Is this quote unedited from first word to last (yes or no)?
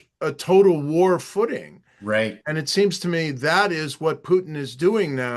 yes